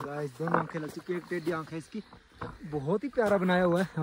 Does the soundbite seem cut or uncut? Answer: uncut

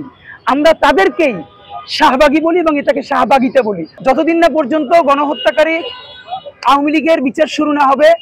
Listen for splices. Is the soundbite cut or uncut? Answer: cut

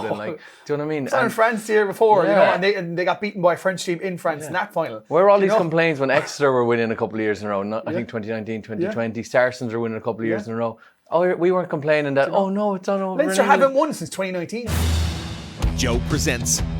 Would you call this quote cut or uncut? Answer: cut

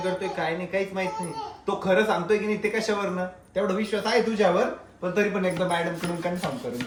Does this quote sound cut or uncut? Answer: uncut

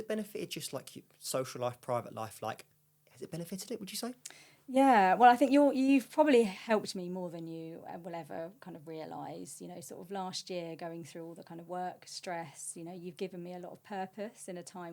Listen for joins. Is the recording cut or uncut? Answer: uncut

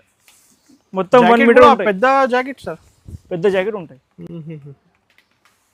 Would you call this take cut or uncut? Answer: uncut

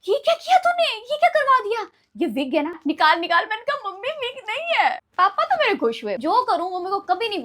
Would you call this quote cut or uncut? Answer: cut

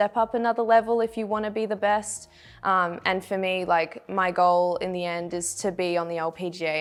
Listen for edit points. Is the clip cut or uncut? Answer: uncut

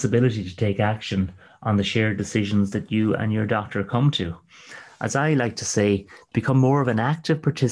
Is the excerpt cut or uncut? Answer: uncut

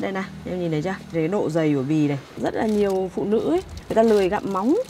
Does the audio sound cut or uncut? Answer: cut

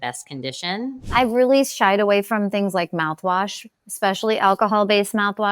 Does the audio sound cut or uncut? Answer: cut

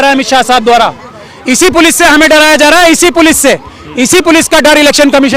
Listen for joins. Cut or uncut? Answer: uncut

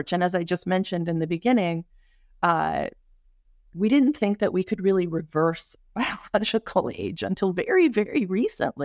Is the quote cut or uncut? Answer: uncut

